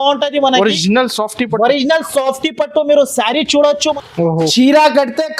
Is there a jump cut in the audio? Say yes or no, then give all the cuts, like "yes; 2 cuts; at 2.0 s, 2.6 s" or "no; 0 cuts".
yes; 1 cut; at 3.9 s